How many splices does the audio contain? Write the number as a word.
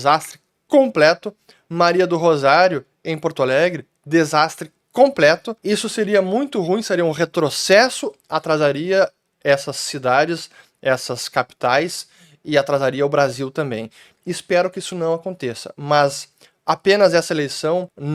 zero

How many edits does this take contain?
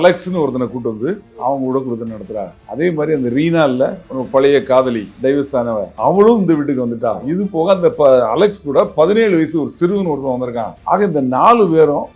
two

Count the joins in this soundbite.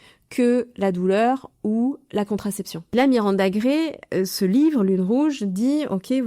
one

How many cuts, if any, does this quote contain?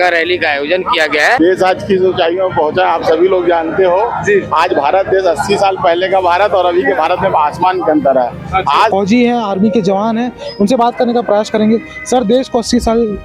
two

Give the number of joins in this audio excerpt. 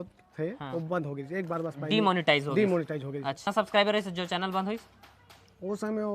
one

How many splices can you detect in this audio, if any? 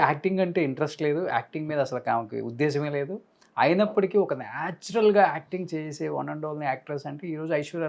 zero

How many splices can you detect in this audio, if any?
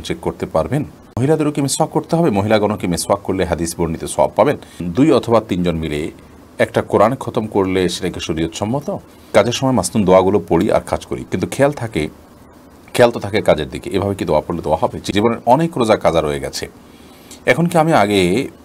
four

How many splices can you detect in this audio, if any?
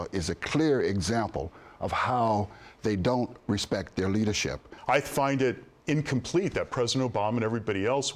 one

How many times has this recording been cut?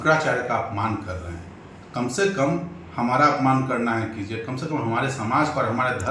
zero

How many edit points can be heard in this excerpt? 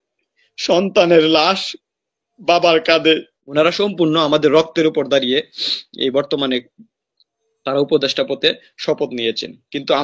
one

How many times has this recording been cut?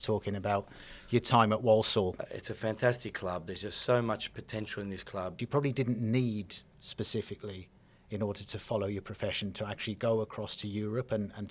two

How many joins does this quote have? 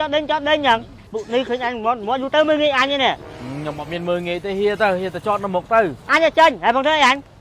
one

